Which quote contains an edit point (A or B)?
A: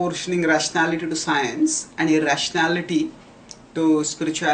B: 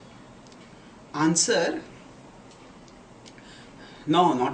A